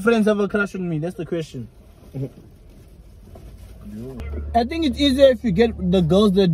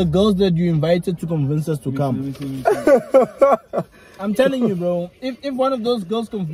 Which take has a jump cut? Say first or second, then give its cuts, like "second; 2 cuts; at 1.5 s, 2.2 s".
first; 1 cut; at 4.3 s